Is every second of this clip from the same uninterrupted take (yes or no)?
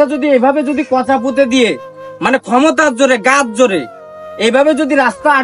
yes